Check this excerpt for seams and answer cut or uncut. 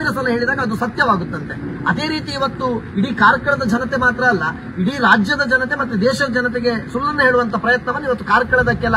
uncut